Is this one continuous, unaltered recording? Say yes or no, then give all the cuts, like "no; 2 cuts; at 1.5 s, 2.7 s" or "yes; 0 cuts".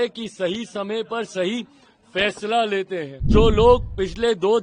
no; 1 cut; at 3.2 s